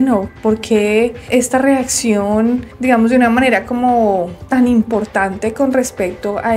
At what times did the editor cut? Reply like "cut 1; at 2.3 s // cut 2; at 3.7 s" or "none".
none